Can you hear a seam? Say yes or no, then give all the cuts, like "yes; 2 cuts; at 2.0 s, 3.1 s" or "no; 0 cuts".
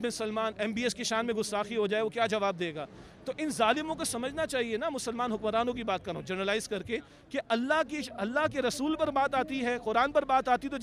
no; 0 cuts